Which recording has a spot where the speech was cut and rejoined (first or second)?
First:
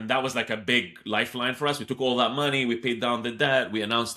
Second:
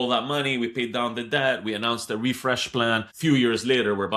second